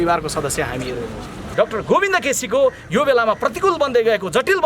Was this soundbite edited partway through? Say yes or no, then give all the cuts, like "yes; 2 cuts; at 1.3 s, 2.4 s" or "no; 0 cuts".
yes; 1 cut; at 1.5 s